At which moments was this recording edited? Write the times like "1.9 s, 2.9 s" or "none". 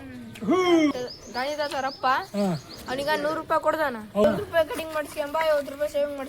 0.9 s, 4.2 s